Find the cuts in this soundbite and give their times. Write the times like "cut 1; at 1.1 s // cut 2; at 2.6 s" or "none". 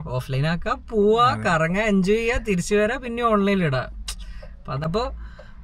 cut 1; at 4.7 s

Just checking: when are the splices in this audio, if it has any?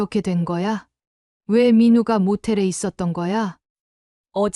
cut 1; at 3.6 s

